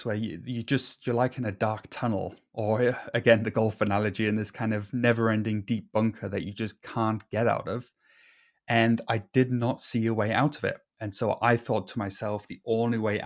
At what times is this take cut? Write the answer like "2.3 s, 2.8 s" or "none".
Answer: none